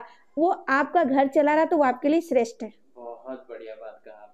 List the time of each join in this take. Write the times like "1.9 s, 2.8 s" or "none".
none